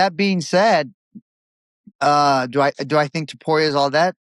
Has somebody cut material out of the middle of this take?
no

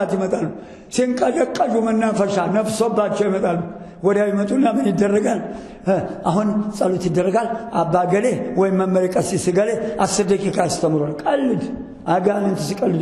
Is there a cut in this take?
no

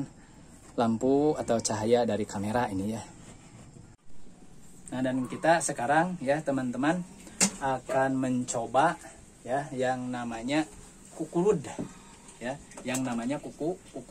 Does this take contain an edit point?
yes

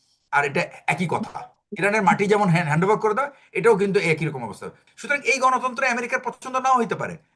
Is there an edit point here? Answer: yes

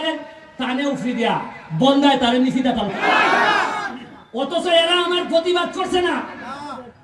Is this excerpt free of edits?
no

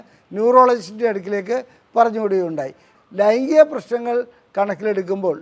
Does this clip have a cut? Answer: yes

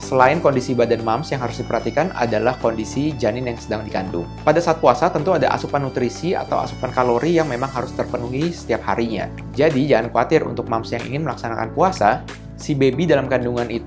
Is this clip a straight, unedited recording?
yes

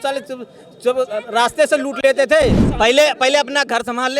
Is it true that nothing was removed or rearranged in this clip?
no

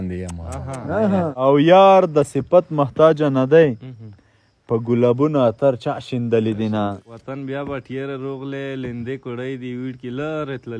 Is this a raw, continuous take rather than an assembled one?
no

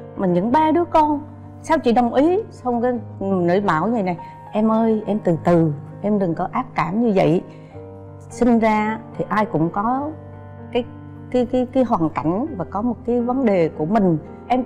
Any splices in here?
no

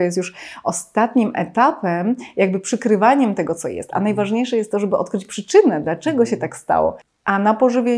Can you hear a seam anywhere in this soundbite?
yes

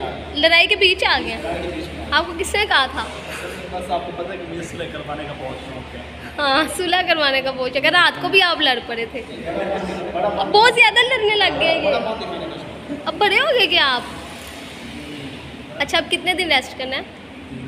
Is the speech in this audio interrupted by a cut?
no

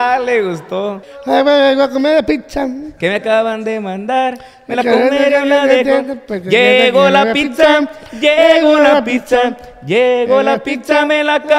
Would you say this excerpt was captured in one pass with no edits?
no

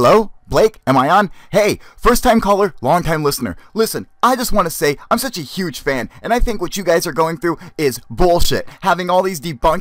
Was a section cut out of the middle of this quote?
yes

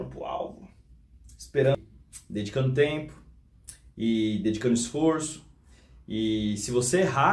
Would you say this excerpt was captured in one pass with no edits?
no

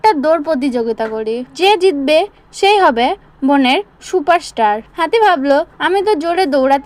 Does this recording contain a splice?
yes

